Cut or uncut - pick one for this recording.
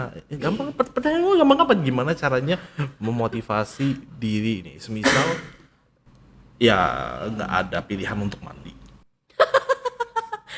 uncut